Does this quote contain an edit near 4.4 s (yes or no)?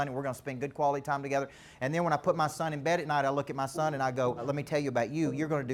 yes